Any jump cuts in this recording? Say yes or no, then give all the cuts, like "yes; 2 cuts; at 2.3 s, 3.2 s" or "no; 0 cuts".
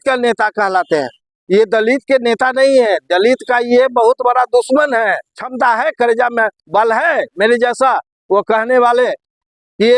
yes; 1 cut; at 5.4 s